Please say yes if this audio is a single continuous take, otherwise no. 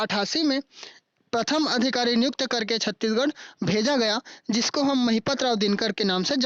yes